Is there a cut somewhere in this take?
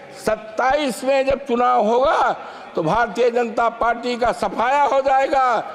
no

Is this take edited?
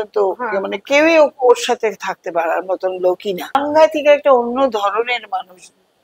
no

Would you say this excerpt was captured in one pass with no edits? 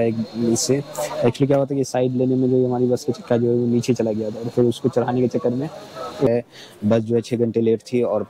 no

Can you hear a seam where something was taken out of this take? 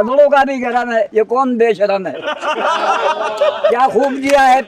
yes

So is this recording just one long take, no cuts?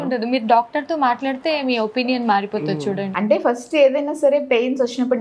no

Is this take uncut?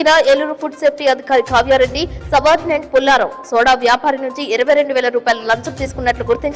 yes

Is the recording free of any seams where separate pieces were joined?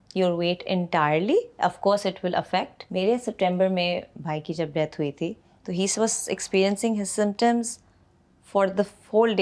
no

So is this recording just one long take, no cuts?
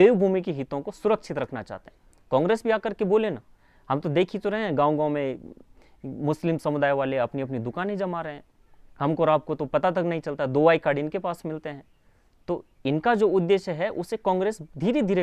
yes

